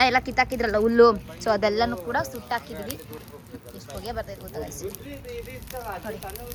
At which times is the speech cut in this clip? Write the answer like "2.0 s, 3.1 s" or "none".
none